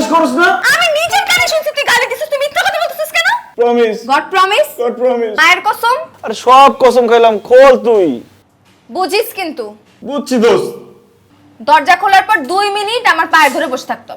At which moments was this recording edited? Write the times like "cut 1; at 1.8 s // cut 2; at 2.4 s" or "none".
cut 1; at 3.5 s